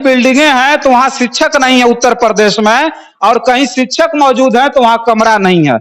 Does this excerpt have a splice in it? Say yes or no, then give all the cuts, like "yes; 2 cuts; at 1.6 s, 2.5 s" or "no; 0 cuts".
no; 0 cuts